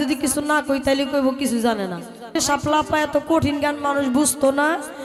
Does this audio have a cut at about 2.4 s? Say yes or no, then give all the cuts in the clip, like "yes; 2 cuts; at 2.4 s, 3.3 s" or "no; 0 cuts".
yes; 1 cut; at 2.4 s